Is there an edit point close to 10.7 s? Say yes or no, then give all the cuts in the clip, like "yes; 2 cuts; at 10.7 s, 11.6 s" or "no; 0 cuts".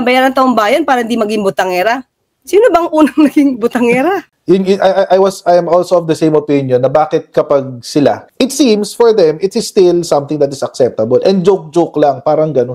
no; 2 cuts; at 4.3 s, 8.3 s